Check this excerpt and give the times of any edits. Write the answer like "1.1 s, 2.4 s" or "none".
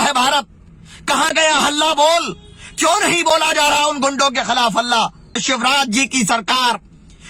5.4 s

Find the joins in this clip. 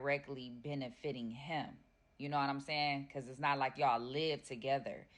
2.3 s

